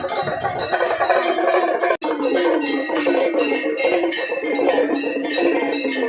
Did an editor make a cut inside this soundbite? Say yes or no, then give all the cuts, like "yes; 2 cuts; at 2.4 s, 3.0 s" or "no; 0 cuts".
yes; 1 cut; at 2.0 s